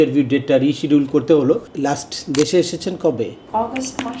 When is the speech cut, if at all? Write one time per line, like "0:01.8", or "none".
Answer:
0:01.7
0:03.4